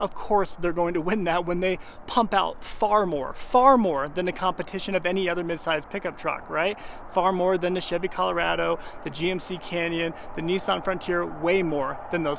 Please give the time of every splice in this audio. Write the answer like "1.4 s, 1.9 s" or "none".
none